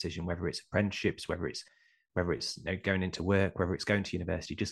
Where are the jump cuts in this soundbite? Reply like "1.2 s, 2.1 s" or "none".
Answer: none

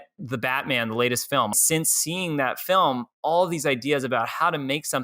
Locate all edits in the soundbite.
1.5 s

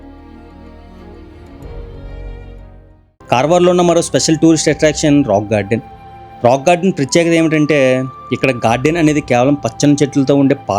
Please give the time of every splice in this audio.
3.0 s

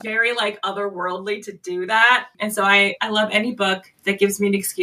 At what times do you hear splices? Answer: none

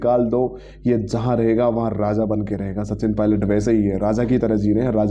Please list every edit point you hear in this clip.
none

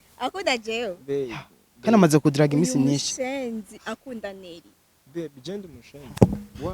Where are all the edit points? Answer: none

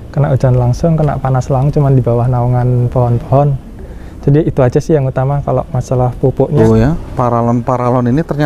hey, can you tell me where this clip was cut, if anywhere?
6.6 s

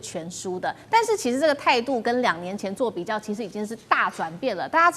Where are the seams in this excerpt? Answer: none

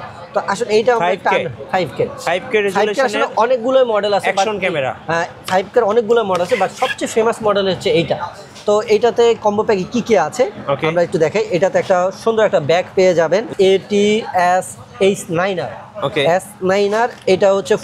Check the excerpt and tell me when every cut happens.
13.5 s

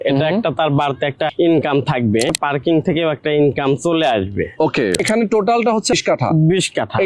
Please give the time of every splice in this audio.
1.3 s, 2.3 s, 5.0 s, 5.9 s

